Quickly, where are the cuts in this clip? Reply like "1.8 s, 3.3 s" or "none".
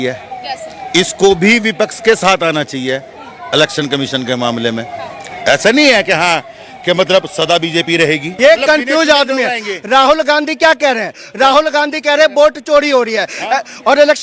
8.3 s